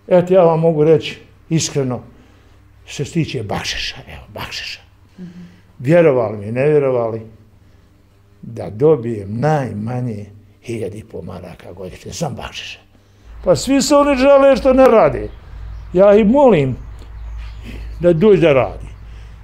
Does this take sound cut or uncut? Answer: cut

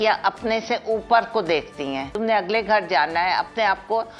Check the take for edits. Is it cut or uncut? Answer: cut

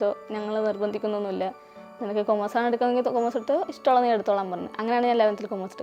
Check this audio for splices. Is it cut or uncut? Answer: uncut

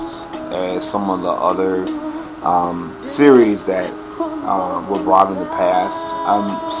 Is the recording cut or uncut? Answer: uncut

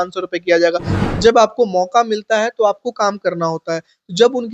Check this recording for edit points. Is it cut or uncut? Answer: cut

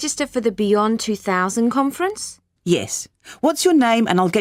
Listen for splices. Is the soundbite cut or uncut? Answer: uncut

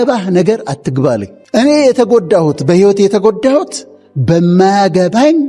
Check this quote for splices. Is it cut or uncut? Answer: cut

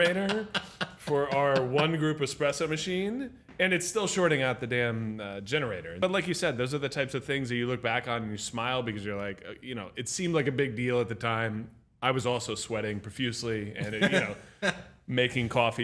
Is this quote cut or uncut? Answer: cut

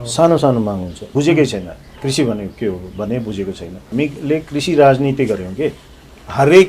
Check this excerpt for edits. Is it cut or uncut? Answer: cut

